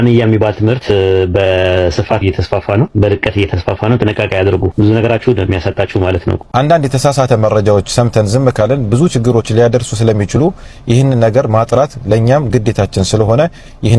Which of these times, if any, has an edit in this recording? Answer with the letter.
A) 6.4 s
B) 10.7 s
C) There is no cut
A